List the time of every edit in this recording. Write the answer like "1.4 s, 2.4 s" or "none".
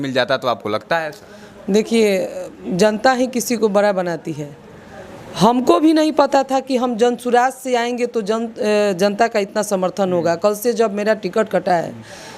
none